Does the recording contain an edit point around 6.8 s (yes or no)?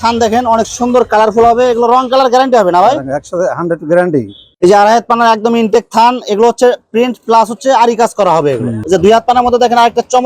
no